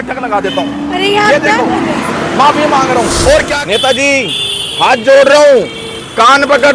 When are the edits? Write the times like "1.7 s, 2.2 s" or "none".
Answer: 3.5 s